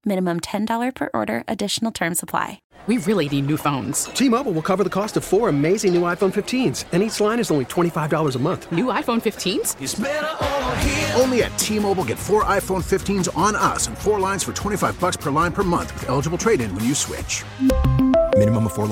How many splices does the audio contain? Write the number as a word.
one